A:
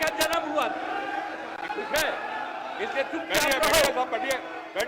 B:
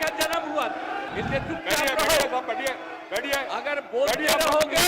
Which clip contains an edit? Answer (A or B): B